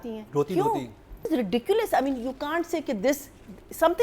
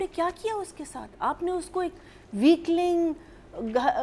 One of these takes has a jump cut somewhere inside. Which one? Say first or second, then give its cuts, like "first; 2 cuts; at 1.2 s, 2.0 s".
first; 1 cut; at 1.3 s